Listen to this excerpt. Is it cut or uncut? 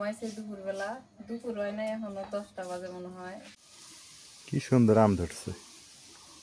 cut